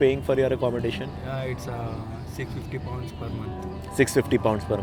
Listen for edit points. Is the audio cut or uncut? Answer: uncut